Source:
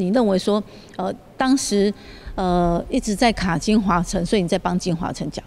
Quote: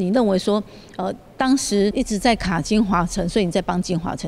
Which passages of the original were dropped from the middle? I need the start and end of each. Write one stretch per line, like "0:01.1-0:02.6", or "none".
0:01.9-0:02.9